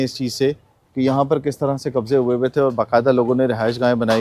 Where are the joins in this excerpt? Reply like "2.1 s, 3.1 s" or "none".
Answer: none